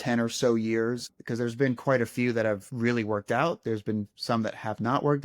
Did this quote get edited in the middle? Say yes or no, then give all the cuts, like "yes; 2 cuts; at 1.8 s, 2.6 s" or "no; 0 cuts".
yes; 2 cuts; at 1.2 s, 2.7 s